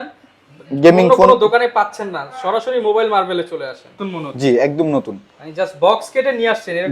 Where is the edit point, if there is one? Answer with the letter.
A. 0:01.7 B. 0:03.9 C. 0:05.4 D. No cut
B